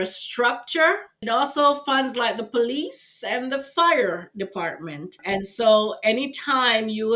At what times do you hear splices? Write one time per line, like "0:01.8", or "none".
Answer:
0:01.2
0:05.2